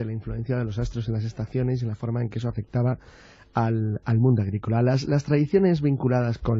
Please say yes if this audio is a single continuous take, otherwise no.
yes